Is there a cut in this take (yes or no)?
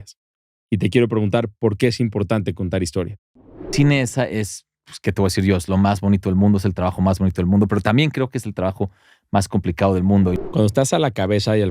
yes